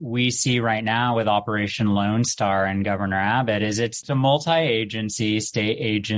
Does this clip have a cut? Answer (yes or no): yes